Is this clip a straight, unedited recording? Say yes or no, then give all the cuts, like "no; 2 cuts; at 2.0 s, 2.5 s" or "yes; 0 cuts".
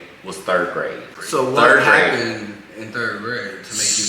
no; 1 cut; at 1.1 s